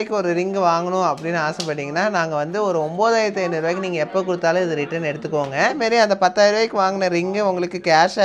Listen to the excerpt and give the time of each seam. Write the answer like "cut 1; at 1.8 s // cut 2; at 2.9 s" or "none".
cut 1; at 5.8 s